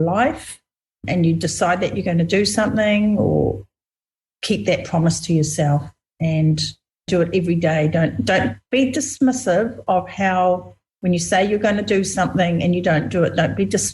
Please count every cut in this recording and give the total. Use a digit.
2